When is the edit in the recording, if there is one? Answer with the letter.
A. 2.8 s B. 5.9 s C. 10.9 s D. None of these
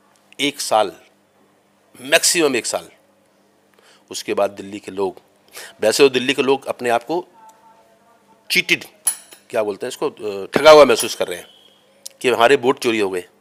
D